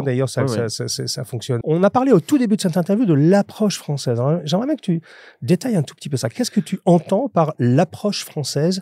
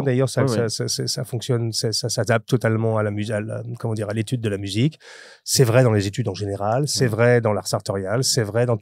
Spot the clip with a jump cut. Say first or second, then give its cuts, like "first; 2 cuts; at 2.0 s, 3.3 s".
first; 1 cut; at 1.5 s